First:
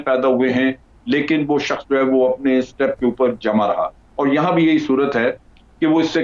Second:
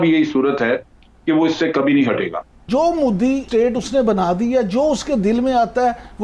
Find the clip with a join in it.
second; 1 cut; at 2.6 s

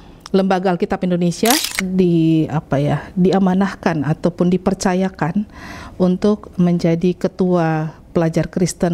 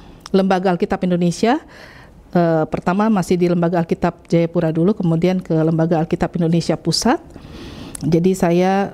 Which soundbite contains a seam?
first; 1 cut; at 1.7 s

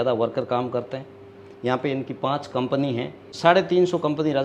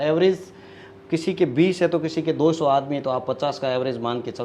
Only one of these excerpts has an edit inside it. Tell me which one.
first; 1 cut; at 3.2 s

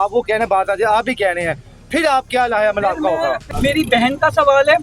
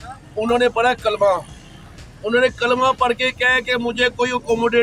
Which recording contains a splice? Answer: first; 1 cut; at 3.5 s

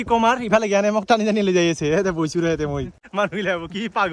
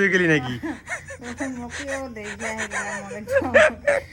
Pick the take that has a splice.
first; 1 cut; at 2.9 s

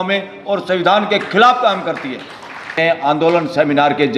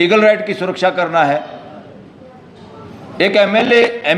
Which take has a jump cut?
first; 1 cut; at 2.7 s

